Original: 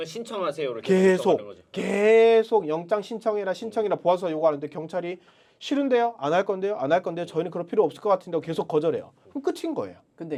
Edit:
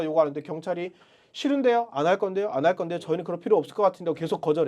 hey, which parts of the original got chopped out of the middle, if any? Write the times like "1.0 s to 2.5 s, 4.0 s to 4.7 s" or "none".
none